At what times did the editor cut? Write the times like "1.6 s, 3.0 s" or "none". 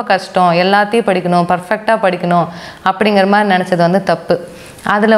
none

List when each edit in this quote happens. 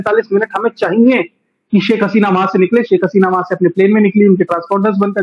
none

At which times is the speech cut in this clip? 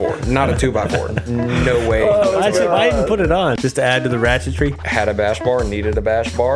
3.6 s, 4.8 s

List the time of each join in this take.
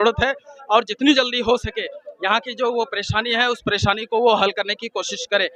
none

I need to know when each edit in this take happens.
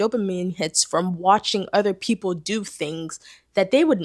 none

